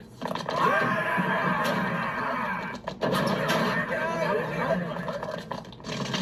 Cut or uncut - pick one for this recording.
uncut